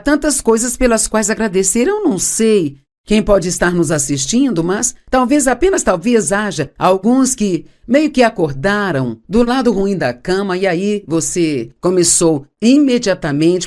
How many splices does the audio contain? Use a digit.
0